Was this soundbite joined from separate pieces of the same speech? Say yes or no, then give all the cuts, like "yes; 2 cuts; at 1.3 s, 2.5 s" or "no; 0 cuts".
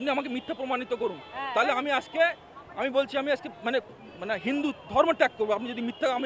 no; 0 cuts